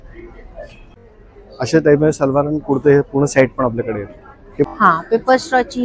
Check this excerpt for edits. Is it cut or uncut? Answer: cut